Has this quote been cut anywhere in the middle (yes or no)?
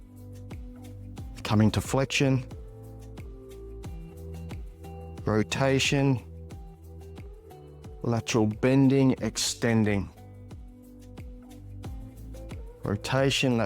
yes